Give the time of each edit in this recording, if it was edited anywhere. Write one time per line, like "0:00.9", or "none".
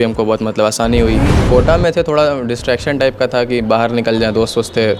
0:01.3